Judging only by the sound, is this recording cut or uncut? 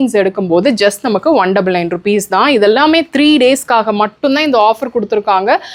uncut